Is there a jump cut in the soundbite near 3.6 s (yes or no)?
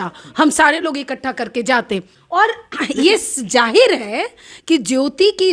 no